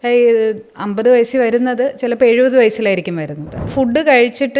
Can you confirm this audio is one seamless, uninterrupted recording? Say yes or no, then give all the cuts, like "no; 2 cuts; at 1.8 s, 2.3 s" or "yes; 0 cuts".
no; 1 cut; at 3.7 s